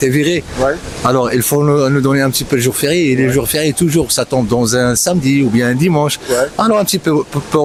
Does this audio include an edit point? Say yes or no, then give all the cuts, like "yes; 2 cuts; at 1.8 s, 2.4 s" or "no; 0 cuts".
no; 0 cuts